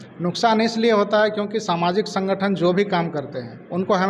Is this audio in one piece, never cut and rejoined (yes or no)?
yes